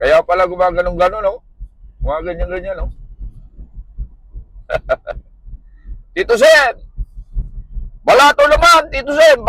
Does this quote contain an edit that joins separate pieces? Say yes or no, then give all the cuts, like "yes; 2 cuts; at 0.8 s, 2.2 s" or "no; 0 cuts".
no; 0 cuts